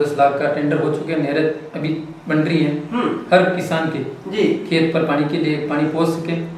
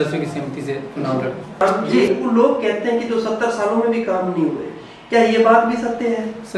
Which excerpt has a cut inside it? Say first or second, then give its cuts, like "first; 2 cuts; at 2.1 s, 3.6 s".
second; 1 cut; at 1.6 s